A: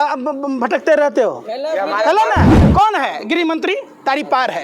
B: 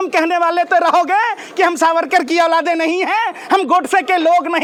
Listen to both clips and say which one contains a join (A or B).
A